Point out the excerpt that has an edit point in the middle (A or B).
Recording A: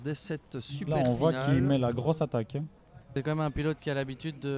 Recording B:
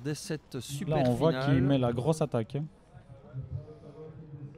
A